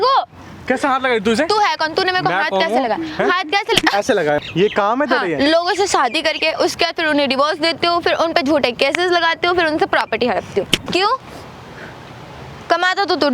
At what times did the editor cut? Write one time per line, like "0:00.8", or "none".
0:04.4
0:10.8